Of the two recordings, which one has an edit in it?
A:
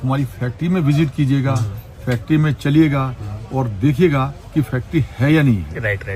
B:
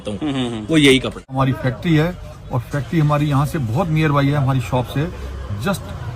B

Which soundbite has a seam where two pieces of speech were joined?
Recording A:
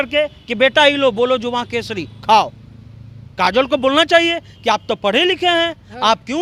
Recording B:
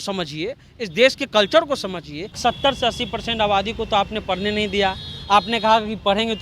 B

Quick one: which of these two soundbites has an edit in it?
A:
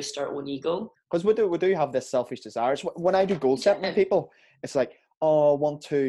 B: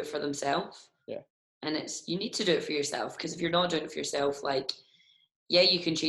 A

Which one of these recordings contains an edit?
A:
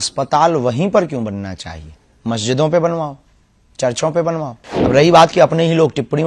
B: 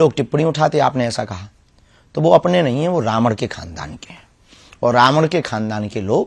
A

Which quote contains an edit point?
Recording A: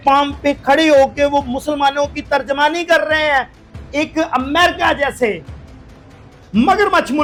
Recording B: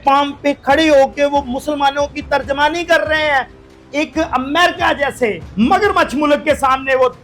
B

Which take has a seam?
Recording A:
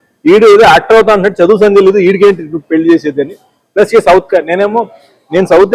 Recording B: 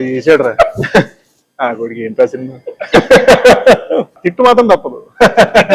B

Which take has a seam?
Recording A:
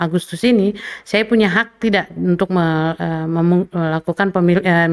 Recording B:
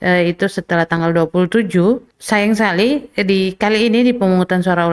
B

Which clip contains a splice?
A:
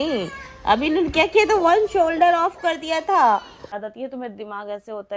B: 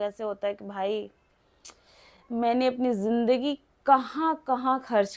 A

